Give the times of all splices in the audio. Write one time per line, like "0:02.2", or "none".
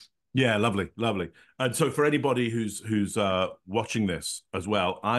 none